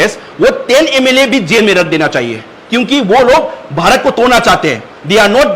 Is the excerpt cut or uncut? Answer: uncut